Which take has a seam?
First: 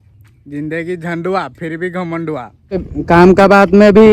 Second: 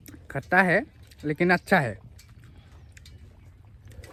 first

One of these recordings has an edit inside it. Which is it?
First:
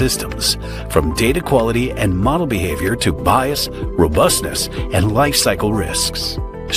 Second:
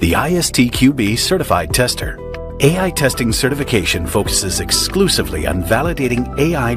second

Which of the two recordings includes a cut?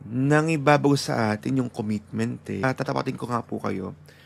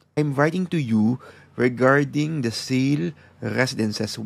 first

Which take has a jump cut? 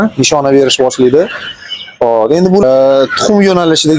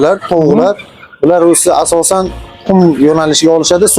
first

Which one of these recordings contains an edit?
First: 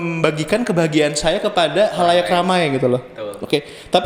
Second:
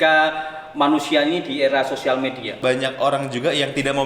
second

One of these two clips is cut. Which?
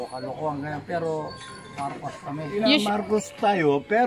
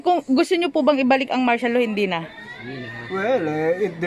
first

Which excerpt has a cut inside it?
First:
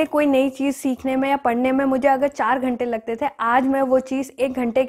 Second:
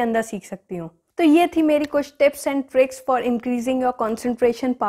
second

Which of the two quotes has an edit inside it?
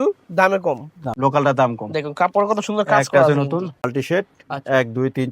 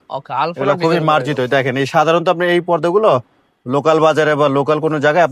first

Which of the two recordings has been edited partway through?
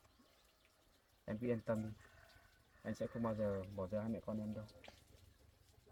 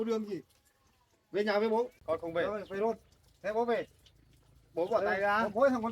second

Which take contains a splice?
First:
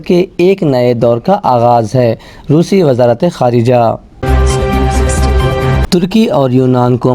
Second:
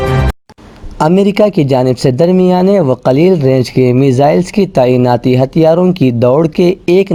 first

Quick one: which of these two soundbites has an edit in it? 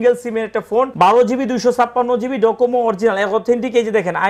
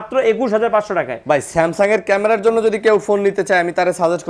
first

